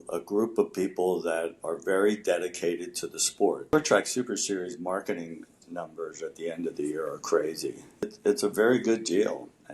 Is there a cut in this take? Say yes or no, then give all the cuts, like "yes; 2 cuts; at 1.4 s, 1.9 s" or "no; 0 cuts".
yes; 2 cuts; at 3.7 s, 8.1 s